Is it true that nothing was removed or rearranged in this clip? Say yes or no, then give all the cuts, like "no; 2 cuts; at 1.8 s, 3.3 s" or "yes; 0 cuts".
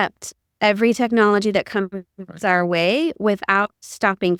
yes; 0 cuts